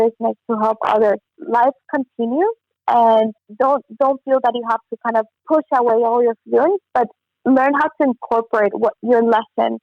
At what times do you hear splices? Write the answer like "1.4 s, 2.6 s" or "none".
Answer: 1.3 s, 3.4 s, 5.4 s

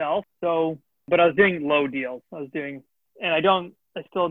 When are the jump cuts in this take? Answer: 1.0 s

